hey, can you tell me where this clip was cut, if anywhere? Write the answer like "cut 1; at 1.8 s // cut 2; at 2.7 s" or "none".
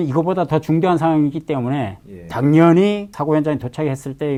none